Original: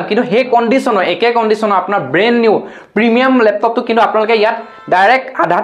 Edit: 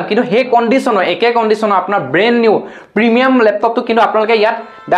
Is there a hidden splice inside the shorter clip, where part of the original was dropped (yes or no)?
no